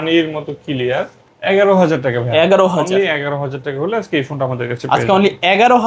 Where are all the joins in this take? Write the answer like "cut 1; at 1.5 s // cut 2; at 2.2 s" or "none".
cut 1; at 1.3 s